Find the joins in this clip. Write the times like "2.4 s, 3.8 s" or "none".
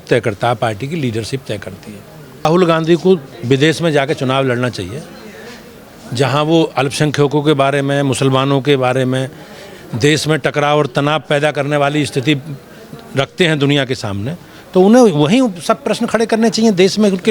2.4 s